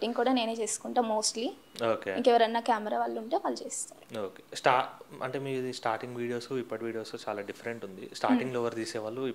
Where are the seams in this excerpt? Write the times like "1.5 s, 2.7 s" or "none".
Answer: none